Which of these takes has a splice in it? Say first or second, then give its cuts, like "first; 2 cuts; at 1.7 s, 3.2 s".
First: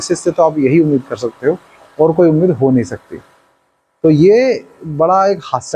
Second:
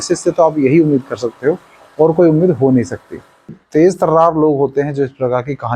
second; 1 cut; at 3.6 s